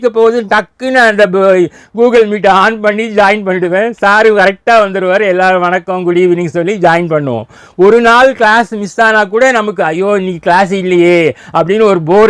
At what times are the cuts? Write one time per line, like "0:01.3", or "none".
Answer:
none